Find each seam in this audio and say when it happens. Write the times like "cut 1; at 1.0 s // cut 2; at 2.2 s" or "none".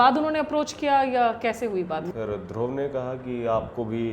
cut 1; at 2.0 s